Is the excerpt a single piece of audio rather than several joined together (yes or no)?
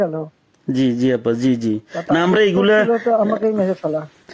yes